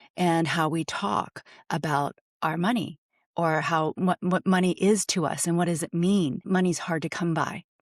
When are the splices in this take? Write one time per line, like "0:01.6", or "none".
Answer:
0:06.4